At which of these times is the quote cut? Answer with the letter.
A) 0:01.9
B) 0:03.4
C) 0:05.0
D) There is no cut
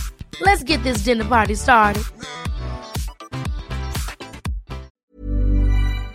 C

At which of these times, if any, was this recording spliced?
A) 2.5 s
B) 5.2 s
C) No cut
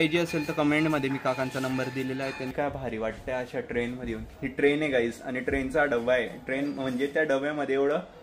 A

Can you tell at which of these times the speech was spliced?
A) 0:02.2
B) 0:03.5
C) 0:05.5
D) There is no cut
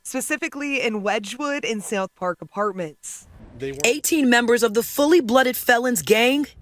B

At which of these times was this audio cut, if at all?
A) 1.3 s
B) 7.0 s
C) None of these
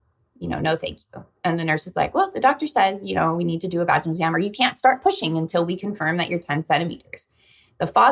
C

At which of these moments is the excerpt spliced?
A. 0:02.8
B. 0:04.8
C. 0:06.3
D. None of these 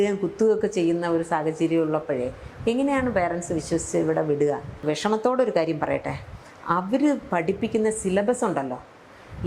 B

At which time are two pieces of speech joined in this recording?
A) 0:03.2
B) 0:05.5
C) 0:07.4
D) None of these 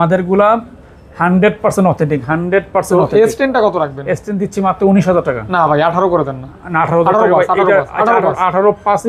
D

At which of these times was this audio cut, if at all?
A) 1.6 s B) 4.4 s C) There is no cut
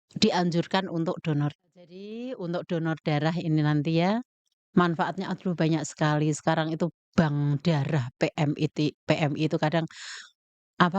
A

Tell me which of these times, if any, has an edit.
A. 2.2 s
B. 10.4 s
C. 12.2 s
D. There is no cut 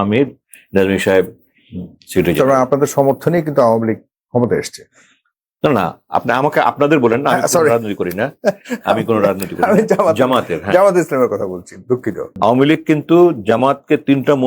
C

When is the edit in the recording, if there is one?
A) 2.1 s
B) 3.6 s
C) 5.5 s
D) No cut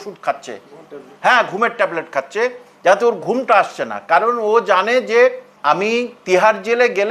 C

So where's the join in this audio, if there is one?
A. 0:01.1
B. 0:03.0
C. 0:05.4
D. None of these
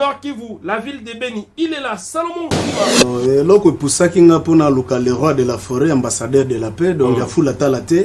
B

